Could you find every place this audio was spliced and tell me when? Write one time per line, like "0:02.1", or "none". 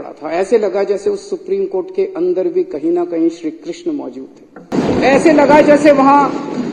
0:04.7